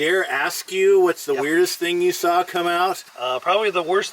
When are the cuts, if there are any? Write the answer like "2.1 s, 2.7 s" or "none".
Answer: 3.1 s